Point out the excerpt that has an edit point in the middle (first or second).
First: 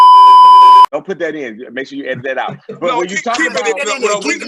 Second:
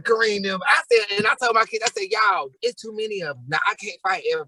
first